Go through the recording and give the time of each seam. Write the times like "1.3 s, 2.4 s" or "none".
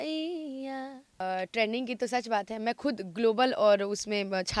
1.2 s